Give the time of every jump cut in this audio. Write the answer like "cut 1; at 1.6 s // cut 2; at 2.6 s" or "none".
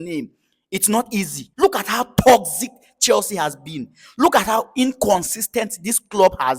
cut 1; at 1.4 s